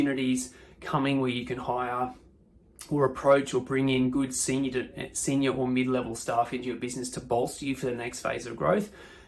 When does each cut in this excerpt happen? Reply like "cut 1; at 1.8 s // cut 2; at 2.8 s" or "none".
none